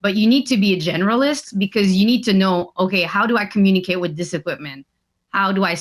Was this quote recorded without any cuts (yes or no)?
yes